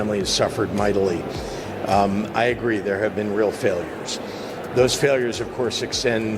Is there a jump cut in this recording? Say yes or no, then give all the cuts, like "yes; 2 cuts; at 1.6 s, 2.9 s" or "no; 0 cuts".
no; 0 cuts